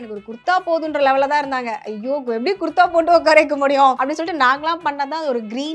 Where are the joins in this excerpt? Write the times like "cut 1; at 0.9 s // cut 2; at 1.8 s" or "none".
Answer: cut 1; at 4.0 s